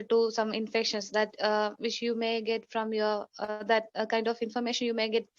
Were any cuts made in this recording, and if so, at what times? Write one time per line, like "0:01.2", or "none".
0:04.3